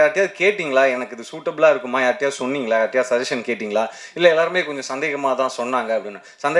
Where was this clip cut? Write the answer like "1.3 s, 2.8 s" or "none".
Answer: none